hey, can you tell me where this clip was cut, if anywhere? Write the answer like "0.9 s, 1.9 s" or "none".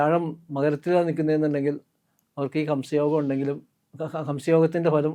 none